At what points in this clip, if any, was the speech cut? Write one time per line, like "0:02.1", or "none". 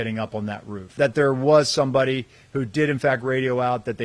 0:00.9